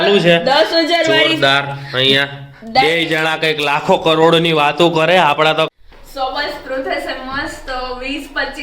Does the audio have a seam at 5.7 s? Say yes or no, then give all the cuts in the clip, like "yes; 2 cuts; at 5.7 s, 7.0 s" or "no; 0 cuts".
yes; 1 cut; at 5.7 s